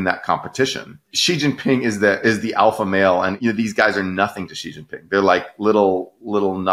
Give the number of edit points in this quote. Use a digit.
2